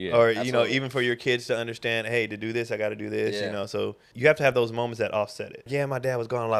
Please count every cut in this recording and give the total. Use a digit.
2